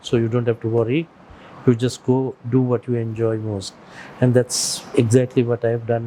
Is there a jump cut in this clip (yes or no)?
no